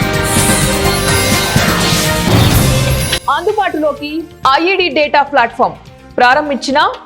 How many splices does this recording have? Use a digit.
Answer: 1